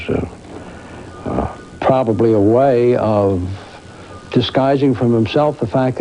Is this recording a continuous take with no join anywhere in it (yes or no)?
no